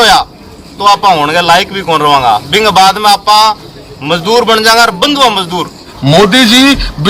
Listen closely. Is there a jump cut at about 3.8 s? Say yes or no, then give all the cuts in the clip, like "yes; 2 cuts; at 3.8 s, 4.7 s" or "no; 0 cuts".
no; 1 cut; at 5.8 s